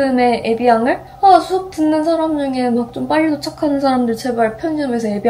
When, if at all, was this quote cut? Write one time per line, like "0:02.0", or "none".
0:01.1